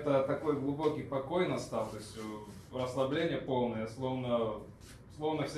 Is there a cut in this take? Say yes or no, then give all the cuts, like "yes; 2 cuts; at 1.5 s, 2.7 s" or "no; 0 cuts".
no; 0 cuts